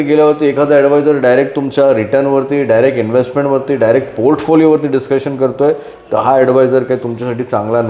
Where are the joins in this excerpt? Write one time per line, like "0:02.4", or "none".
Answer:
none

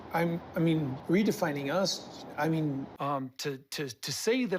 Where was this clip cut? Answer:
0:01.0
0:02.9

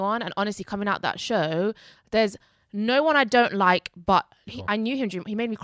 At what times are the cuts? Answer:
0:04.5

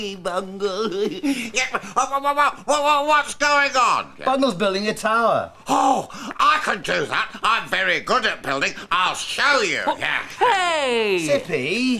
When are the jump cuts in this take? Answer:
0:10.3

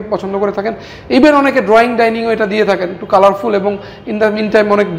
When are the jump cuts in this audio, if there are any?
none

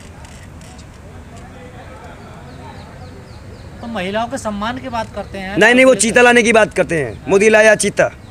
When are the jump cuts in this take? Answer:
none

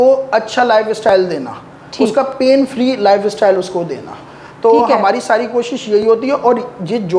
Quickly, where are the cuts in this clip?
none

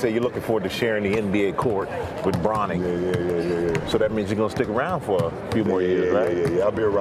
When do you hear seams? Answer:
none

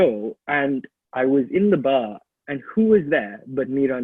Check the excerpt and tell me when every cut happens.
none

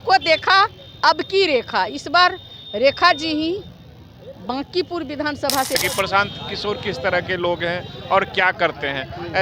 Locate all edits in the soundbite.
0:05.8

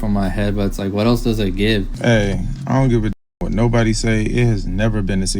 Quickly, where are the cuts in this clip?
0:01.9

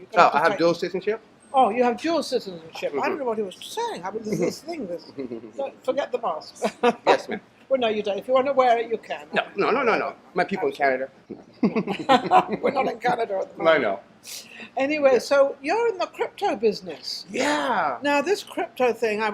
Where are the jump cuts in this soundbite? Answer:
0:03.2

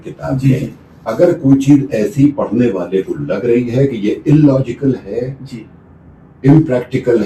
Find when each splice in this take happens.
none

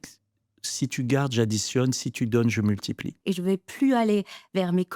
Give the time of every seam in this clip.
0:03.1

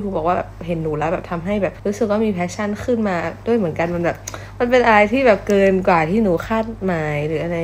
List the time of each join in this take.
none

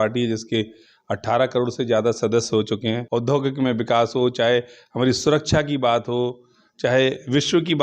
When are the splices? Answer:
0:03.0

